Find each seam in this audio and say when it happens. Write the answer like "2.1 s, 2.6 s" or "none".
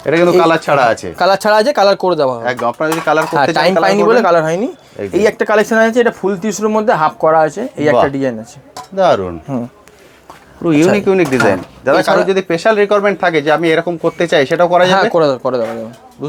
none